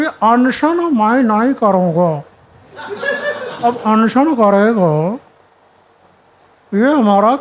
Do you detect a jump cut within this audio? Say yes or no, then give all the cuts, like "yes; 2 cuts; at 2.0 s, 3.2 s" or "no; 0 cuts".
no; 0 cuts